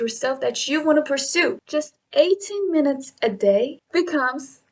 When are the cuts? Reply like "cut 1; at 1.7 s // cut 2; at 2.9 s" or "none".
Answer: cut 1; at 1.6 s // cut 2; at 3.8 s